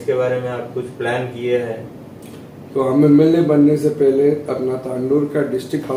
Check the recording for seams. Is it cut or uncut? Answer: uncut